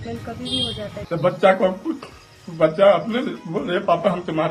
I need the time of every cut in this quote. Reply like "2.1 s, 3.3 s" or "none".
1.0 s